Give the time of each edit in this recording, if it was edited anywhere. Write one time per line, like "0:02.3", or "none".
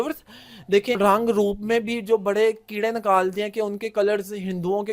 0:01.0